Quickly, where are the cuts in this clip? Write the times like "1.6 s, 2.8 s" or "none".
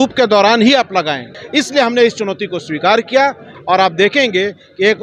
1.3 s, 3.5 s